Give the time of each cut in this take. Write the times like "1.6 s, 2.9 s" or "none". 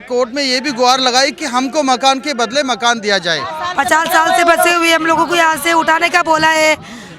3.6 s